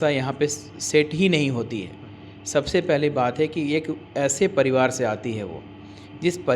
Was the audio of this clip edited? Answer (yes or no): no